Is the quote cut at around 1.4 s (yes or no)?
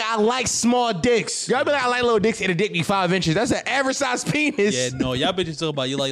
yes